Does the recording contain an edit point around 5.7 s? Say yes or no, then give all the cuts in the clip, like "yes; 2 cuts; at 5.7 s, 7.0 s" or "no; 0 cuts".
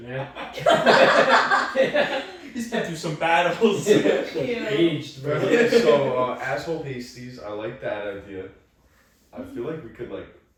no; 0 cuts